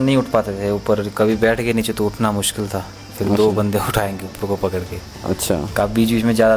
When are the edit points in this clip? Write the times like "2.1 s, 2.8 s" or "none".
none

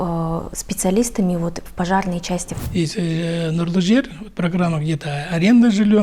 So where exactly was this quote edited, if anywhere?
2.6 s

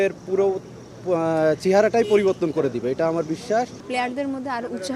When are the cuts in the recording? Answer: 3.8 s

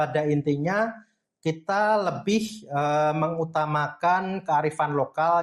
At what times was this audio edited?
none

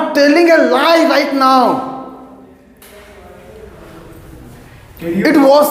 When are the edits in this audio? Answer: none

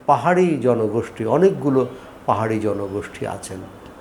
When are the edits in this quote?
none

